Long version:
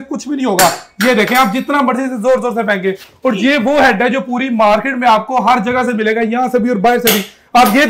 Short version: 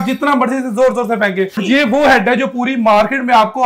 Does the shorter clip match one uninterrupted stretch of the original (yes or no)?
no